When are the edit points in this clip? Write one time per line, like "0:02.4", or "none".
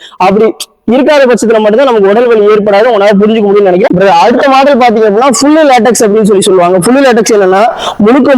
0:03.9